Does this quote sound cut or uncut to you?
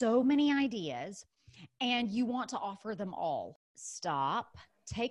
cut